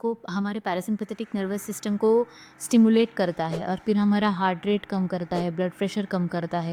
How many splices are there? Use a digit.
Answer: 0